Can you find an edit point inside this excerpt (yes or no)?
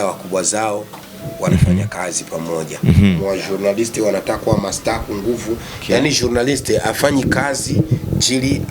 yes